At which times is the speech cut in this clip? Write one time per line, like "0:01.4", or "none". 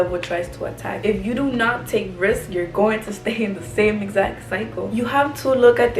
0:00.9
0:04.8